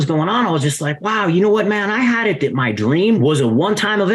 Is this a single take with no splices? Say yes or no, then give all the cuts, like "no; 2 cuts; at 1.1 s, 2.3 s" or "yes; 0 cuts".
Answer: no; 1 cut; at 3.2 s